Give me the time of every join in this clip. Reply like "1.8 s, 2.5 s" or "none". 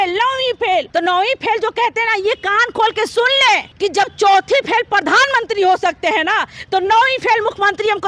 0.9 s, 3.7 s